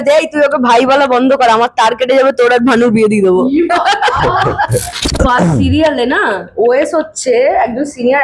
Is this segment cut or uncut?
cut